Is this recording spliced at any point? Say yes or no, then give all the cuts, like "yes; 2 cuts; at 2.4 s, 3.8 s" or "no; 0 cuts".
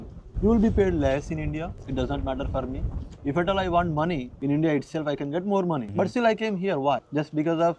yes; 1 cut; at 4.3 s